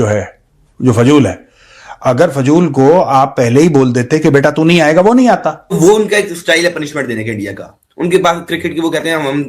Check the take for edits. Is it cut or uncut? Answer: cut